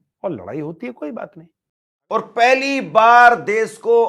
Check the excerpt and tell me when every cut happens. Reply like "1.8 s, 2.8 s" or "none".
1.5 s